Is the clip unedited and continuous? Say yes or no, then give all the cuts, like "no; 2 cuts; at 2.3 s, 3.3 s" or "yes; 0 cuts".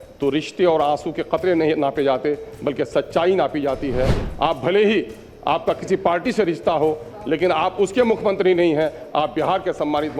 yes; 0 cuts